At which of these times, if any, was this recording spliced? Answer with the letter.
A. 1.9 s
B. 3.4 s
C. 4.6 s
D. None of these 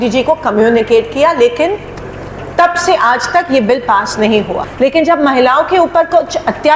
C